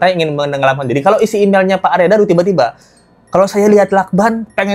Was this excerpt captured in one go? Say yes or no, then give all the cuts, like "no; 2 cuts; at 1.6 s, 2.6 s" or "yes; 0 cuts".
yes; 0 cuts